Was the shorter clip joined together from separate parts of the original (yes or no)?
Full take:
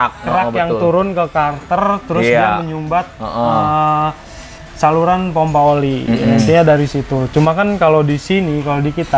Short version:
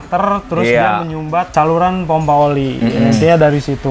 yes